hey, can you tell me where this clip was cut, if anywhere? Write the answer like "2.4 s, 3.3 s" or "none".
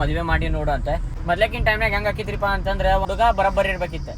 1.1 s, 3.0 s